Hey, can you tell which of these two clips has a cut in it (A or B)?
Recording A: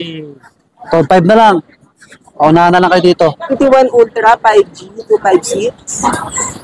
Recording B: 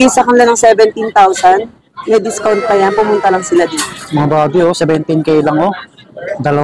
A